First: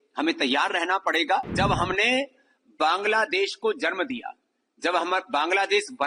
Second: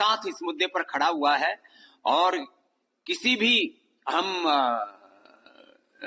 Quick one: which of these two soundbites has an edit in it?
first; 1 cut; at 1.5 s

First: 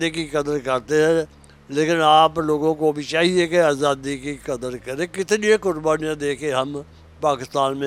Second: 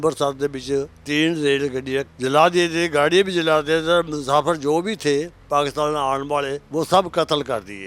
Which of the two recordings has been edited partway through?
second; 3 cuts; at 1.0 s, 2.1 s, 6.6 s

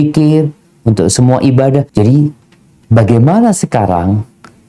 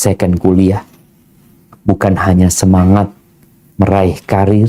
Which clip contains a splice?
first; 1 cut; at 1.9 s

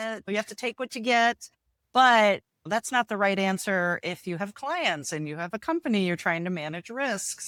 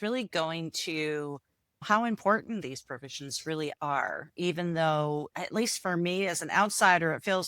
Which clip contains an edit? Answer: second; 1 cut; at 5.3 s

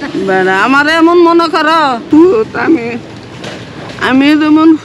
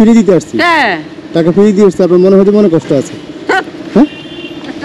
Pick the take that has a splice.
first; 1 cut; at 2.0 s

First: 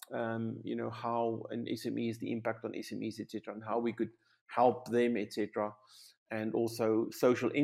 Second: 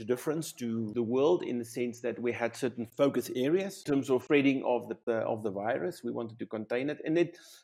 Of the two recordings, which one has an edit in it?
second; 4 cuts; at 0.9 s, 2.9 s, 4.1 s, 5.0 s

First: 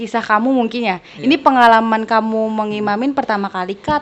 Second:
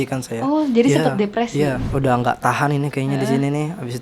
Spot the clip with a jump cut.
second; 1 cut; at 1.8 s

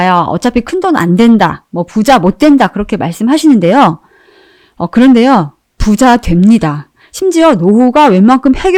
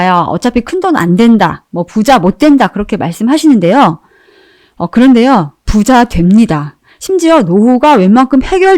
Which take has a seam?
second; 1 cut; at 5.6 s

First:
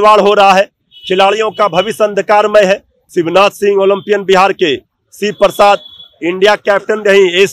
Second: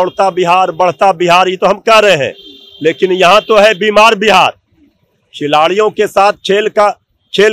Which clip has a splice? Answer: first; 1 cut; at 3.0 s

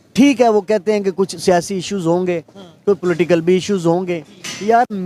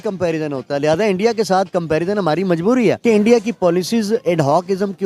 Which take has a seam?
second; 1 cut; at 3.0 s

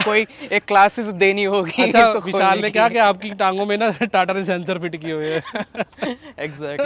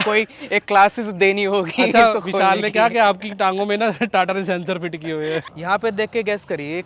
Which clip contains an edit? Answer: second; 1 cut; at 5.5 s

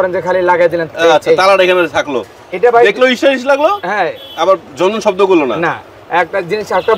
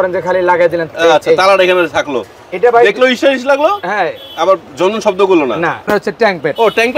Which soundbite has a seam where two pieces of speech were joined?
second; 1 cut; at 5.8 s

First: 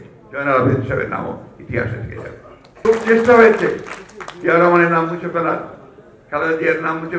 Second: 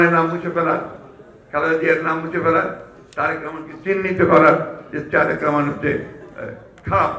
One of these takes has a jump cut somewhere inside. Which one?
first; 1 cut; at 2.8 s

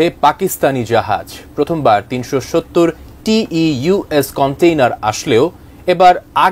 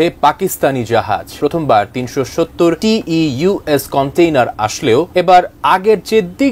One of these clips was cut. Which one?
second; 3 cuts; at 1.3 s, 2.8 s, 5.1 s

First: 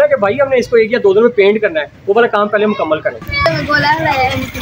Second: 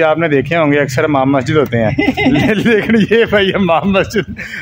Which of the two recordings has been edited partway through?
first; 1 cut; at 3.1 s

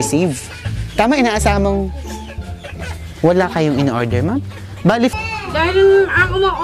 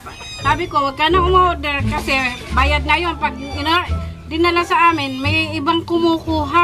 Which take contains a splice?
first; 1 cut; at 5.1 s

